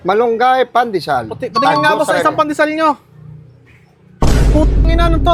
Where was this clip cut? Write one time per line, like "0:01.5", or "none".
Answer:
none